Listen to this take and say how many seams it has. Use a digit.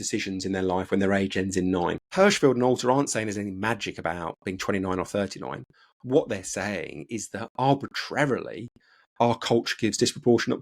1